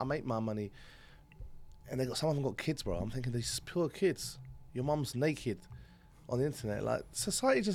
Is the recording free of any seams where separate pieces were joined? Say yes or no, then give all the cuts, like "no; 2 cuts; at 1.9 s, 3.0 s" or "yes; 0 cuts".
yes; 0 cuts